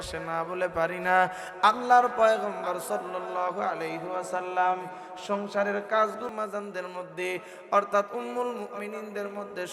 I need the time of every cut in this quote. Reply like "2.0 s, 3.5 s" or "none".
6.3 s